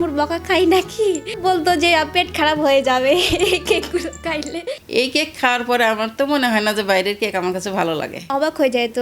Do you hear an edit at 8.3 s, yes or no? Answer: yes